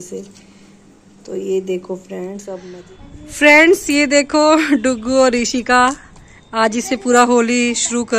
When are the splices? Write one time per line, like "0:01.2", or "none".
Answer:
0:02.6